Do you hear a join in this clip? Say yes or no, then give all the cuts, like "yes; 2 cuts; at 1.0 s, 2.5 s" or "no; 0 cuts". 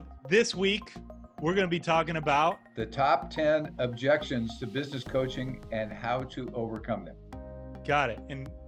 no; 0 cuts